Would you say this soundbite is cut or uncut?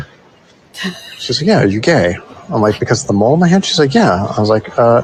uncut